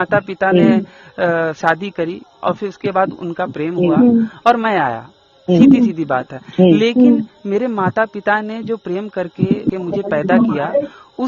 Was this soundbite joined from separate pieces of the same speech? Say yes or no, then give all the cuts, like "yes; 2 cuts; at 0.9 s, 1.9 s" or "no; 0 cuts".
no; 0 cuts